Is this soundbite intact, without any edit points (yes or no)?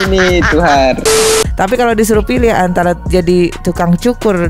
no